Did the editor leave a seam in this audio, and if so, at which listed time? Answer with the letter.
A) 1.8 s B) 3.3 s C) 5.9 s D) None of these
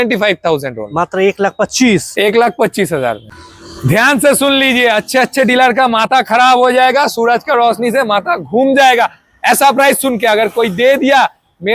B